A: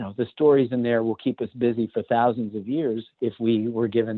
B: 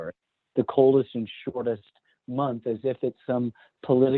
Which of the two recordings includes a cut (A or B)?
A